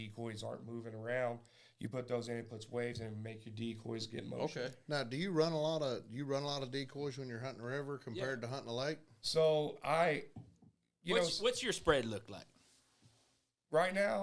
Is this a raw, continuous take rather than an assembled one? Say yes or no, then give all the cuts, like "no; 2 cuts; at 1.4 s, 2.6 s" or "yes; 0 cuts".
yes; 0 cuts